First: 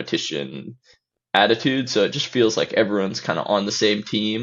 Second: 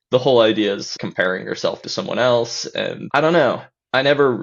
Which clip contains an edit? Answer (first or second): second